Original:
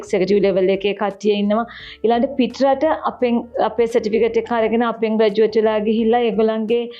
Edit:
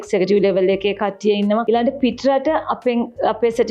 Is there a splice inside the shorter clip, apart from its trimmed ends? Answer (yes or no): yes